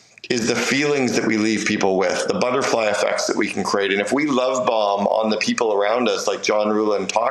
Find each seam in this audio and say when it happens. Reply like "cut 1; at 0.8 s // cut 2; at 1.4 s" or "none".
none